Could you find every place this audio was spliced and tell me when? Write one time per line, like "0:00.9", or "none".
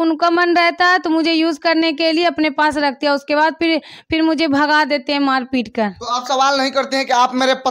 none